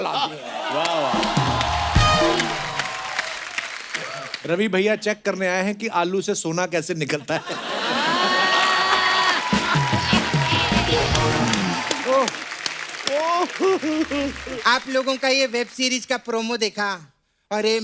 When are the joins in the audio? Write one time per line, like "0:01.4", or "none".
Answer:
0:04.3
0:14.5